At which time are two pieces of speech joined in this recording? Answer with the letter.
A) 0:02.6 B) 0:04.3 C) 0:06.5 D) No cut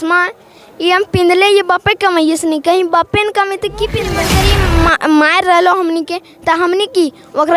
B